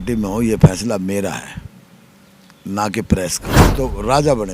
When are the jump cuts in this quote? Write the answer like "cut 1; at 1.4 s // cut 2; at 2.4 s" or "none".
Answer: cut 1; at 3.6 s